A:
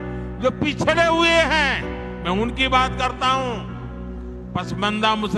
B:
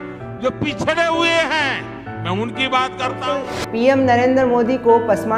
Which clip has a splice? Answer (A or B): B